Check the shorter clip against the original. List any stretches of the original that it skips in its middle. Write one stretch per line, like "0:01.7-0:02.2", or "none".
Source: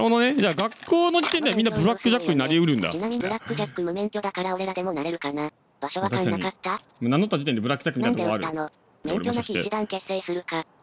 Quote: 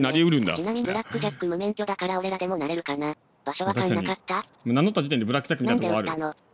none

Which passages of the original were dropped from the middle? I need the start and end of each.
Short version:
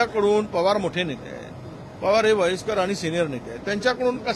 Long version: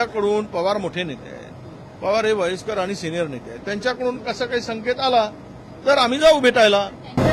none

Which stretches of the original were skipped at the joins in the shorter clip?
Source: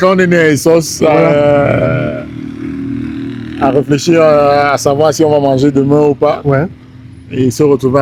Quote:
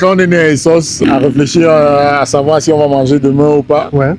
0:00.9-0:03.5

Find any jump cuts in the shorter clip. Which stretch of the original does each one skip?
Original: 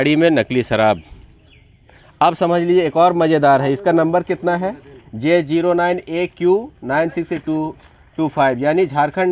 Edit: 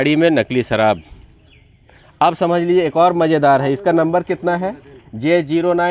none

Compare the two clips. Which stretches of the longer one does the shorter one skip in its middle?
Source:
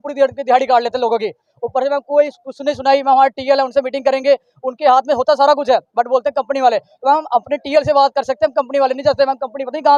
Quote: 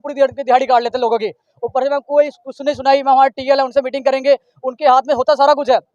none

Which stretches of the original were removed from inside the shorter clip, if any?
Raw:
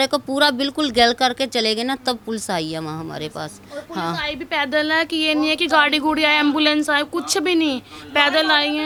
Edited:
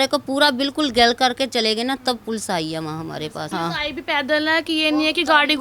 0:03.5-0:03.9

